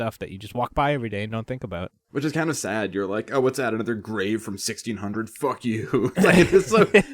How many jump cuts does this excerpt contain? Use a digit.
1